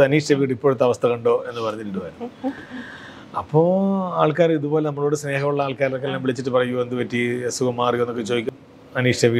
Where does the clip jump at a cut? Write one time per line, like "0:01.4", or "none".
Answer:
0:08.5